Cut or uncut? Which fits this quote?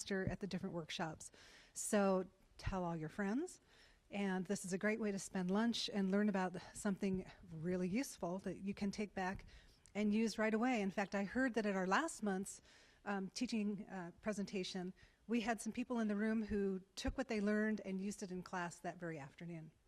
cut